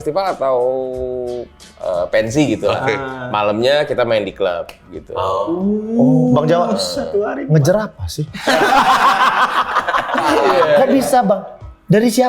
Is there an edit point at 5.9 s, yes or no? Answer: no